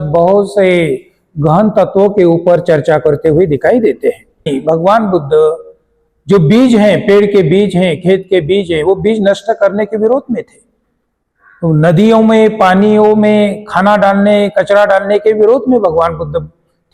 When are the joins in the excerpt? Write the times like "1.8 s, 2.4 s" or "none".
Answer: 4.5 s